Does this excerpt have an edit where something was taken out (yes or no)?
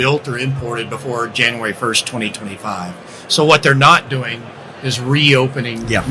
no